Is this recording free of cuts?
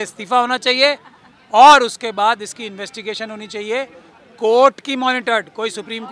yes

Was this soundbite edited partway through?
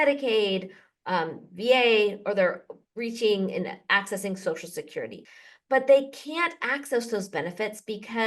yes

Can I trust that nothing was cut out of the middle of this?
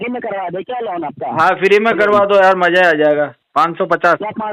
no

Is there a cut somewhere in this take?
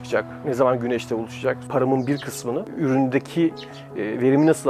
yes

